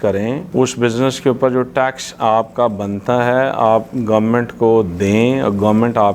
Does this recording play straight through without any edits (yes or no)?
yes